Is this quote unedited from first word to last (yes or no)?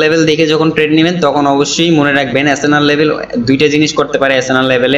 yes